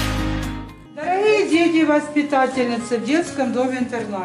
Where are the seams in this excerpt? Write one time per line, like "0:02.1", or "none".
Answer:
none